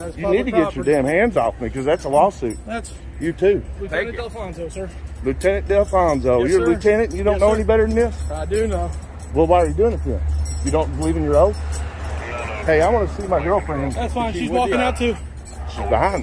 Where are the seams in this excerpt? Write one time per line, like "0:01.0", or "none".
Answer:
none